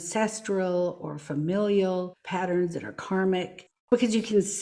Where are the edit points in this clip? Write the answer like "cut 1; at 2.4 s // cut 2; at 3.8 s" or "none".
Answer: cut 1; at 2.2 s // cut 2; at 3.8 s